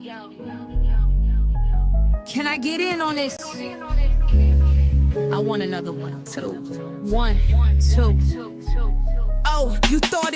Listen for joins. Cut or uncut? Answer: cut